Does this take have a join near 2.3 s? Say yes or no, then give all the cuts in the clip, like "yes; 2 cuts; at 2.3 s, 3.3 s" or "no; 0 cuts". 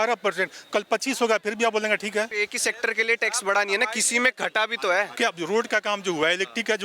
yes; 2 cuts; at 2.3 s, 5.1 s